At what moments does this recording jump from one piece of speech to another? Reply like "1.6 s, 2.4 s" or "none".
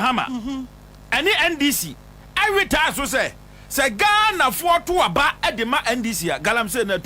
none